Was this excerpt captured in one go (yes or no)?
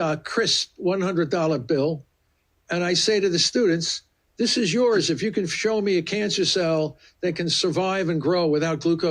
yes